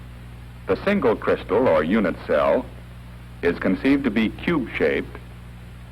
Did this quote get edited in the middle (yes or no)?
yes